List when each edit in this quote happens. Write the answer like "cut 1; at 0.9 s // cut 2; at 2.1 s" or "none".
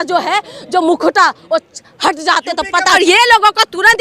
cut 1; at 2.9 s